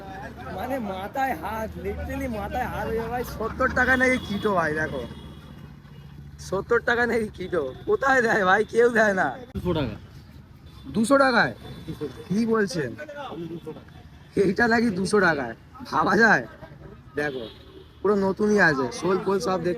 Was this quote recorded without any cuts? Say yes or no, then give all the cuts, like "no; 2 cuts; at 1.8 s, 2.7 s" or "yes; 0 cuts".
no; 1 cut; at 9.5 s